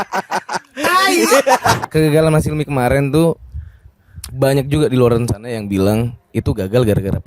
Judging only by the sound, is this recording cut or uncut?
cut